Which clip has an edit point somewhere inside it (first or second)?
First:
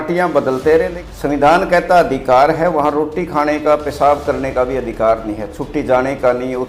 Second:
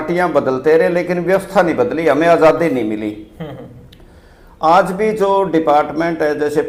first